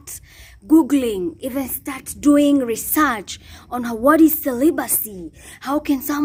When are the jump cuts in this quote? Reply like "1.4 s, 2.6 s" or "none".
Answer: none